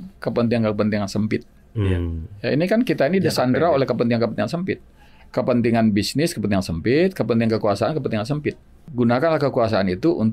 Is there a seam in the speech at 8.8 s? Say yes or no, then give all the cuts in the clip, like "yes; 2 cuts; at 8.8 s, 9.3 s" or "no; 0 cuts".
yes; 1 cut; at 8.8 s